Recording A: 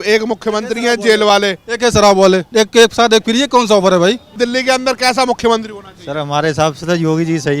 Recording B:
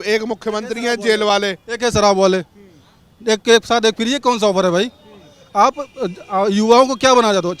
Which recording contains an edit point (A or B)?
A